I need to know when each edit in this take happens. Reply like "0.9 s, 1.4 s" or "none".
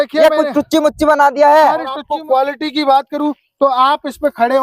2.0 s